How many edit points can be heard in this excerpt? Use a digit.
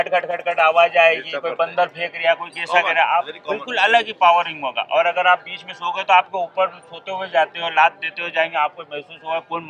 0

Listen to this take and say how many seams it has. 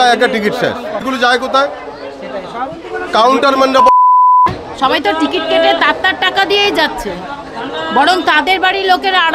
2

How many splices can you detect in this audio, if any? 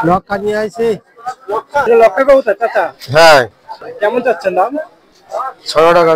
2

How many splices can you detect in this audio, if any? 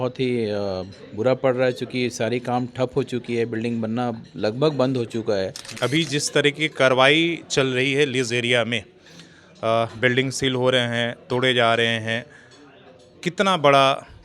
1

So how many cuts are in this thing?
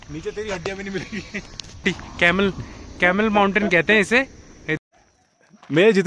2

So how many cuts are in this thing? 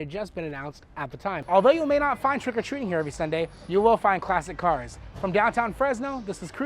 1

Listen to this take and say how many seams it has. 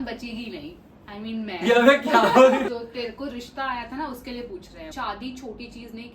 2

